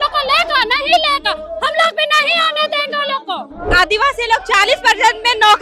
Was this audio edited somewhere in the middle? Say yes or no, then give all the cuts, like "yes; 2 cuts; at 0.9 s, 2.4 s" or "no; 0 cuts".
yes; 1 cut; at 3.7 s